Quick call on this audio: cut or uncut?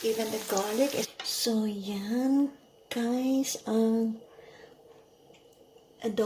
cut